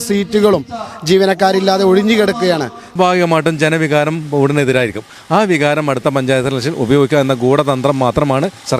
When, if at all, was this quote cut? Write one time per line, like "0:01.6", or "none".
0:02.9

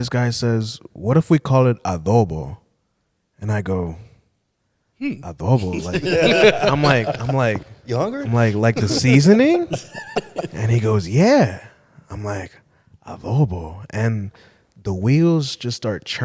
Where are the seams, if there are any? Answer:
none

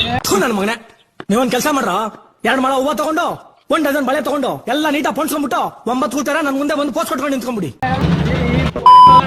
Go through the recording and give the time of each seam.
0:08.0

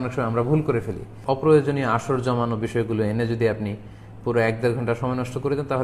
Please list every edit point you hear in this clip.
0:01.2

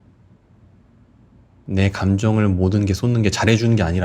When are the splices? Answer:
0:01.6

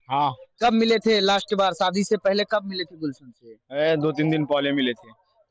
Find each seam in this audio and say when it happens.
none

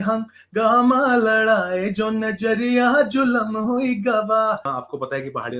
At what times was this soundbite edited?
0:04.7

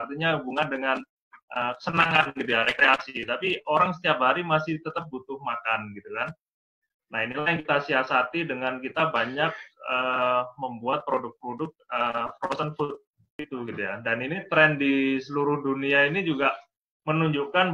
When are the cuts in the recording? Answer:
0:13.4

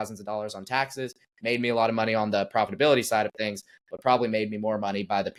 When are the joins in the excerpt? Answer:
none

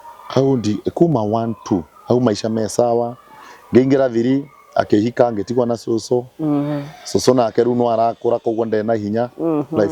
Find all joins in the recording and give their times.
none

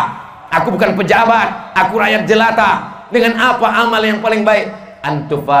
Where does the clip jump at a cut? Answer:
none

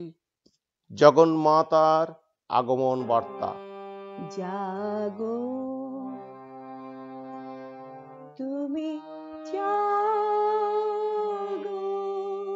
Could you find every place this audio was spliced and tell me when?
0:03.7

